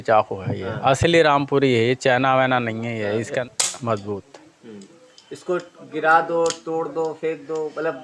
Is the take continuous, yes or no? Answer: no